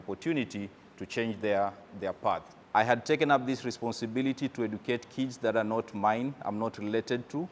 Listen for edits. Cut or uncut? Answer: cut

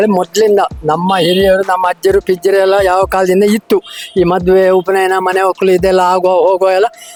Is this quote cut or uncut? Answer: uncut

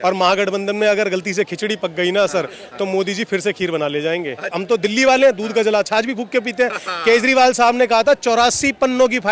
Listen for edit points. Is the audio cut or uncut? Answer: cut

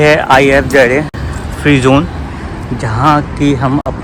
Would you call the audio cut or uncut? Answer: uncut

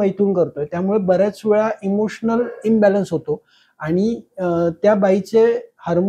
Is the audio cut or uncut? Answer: uncut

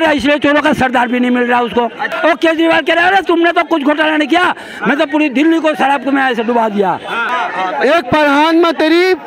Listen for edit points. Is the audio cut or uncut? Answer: cut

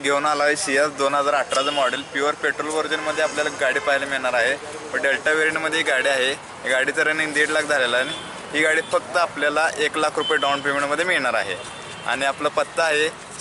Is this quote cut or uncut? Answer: uncut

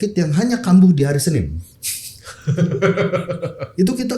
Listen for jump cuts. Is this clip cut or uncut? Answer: uncut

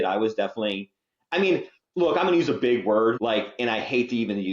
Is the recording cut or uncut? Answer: cut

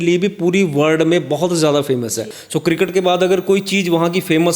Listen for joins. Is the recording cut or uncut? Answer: uncut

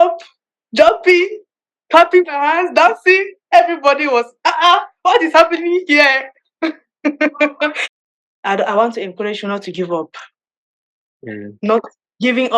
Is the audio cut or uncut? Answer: cut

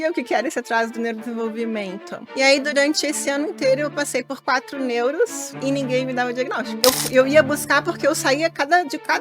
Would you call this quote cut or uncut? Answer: cut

